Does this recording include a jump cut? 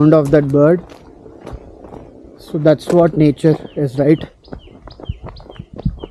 no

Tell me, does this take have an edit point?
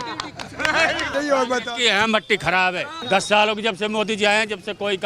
yes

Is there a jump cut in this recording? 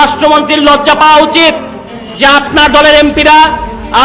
no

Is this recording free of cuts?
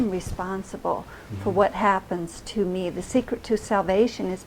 yes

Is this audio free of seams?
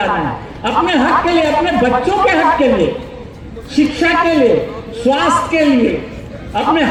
yes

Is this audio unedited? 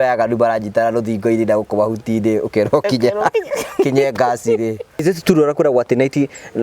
no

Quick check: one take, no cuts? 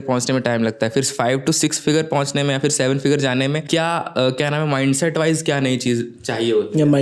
no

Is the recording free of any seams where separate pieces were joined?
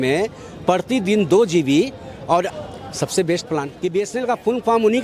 no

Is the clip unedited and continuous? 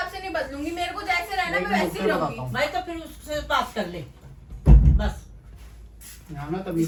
yes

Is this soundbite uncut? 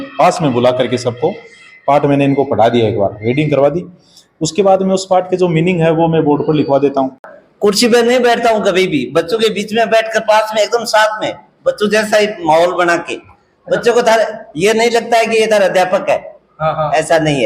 no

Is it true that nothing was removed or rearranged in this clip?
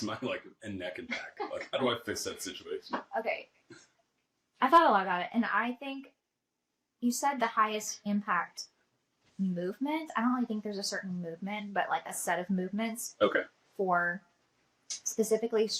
yes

